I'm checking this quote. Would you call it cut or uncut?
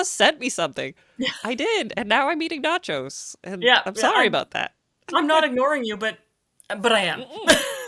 uncut